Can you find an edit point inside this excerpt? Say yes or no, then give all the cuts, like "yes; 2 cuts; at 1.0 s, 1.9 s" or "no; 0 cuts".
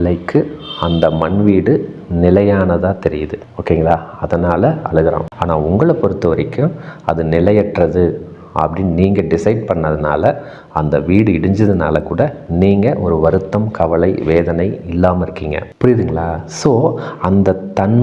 yes; 1 cut; at 15.7 s